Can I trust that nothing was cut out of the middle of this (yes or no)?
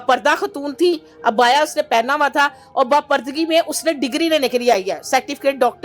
yes